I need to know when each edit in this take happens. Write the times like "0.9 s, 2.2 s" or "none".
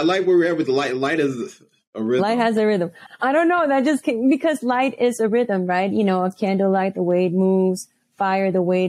3.1 s